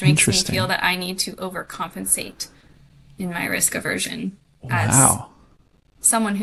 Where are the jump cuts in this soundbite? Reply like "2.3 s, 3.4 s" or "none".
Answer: none